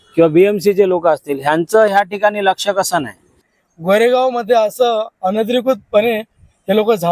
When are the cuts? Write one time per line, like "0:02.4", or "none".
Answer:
0:03.5